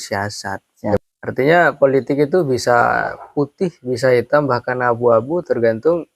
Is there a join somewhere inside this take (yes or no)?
yes